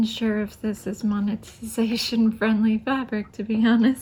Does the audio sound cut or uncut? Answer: uncut